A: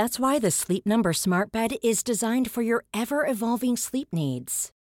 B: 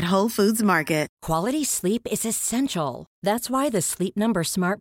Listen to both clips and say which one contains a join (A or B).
B